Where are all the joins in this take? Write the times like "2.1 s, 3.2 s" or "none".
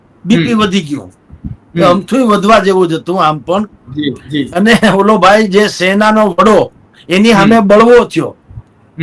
none

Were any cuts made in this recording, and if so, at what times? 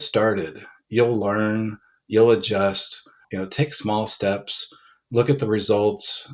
3.3 s

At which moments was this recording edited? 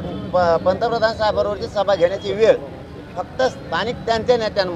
none

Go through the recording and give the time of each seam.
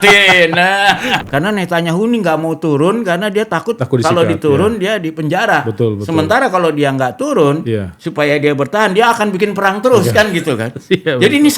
1.2 s

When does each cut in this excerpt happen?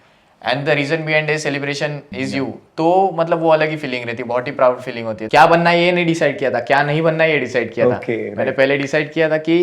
2.0 s, 5.2 s

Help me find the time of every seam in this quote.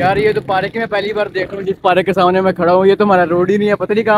none

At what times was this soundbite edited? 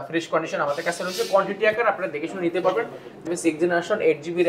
3.3 s

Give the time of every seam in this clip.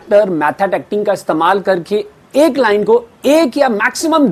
none

